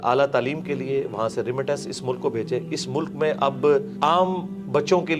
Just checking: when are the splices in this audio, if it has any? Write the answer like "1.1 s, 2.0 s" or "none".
3.9 s